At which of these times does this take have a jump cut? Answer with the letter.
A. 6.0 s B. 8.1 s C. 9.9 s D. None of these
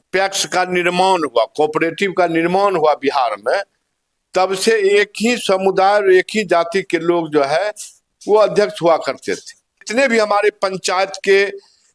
C